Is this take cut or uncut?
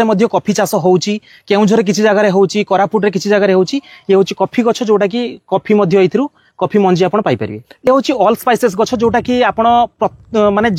uncut